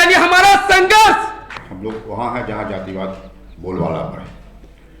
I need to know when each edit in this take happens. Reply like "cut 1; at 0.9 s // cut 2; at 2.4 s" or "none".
cut 1; at 1.6 s